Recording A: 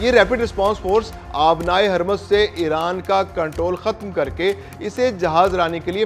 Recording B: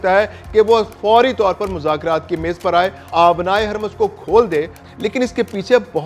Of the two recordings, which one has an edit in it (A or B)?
B